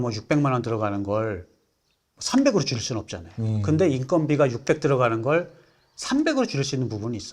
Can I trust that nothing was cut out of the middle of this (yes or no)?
yes